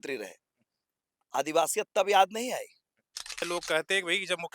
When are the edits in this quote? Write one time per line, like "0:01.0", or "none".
0:03.4